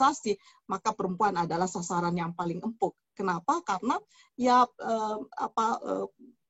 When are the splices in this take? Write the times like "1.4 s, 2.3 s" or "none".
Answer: none